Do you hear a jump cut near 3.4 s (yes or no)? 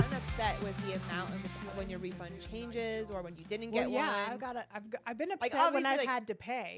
no